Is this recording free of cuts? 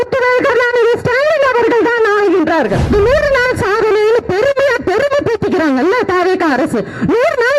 no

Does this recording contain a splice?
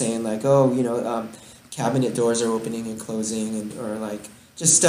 no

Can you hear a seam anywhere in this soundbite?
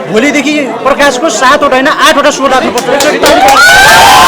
yes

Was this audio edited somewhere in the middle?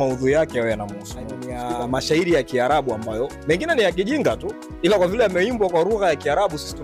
yes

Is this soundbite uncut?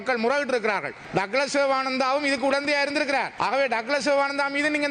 no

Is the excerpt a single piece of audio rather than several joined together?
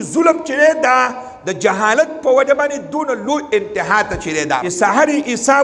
no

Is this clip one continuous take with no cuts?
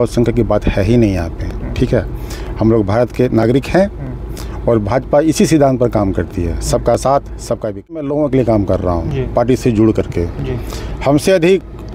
no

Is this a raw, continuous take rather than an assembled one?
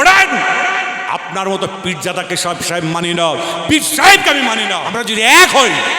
no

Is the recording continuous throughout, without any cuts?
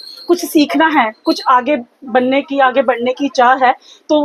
yes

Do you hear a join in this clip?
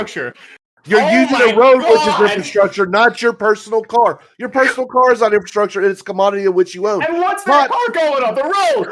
no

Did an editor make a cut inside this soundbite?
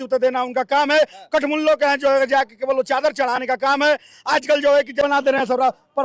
yes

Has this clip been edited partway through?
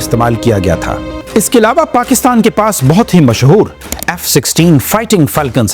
yes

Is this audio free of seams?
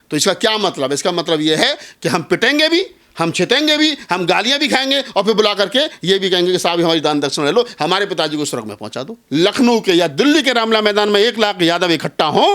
no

